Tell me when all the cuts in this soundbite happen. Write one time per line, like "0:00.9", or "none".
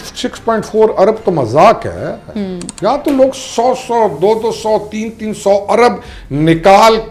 none